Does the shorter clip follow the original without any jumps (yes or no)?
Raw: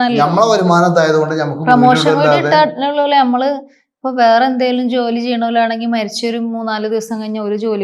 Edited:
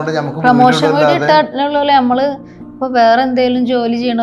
yes